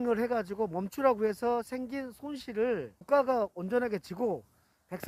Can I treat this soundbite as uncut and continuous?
yes; 0 cuts

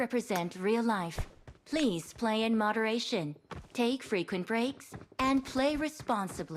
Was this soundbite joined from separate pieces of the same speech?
no; 0 cuts

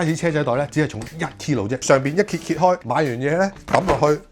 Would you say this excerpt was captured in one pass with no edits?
no; 1 cut; at 1.8 s

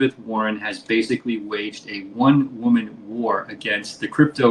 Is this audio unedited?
yes; 0 cuts

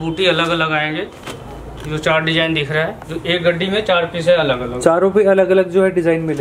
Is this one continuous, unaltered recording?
yes; 0 cuts

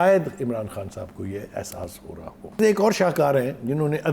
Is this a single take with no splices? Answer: no; 1 cut; at 2.6 s

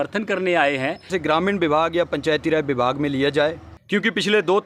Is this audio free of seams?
no; 2 cuts; at 1.1 s, 3.7 s

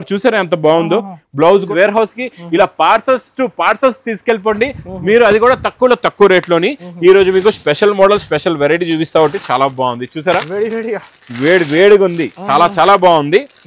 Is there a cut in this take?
yes; 1 cut; at 1.7 s

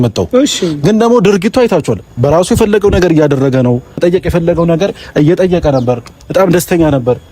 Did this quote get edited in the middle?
yes; 1 cut; at 4.0 s

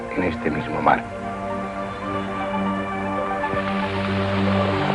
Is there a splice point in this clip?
no; 0 cuts

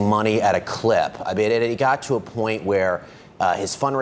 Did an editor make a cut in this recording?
no; 0 cuts

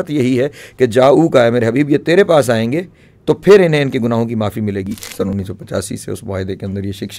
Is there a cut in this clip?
yes; 1 cut; at 5.0 s

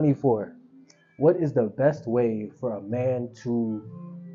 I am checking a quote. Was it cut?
no; 0 cuts

